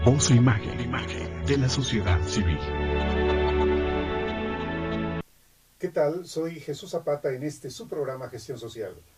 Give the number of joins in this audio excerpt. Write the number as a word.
one